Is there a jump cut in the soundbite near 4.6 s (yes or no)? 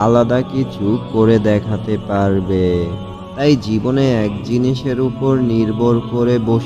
no